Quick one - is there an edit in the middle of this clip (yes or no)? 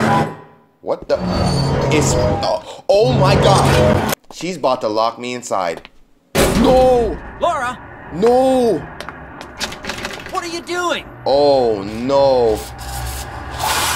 yes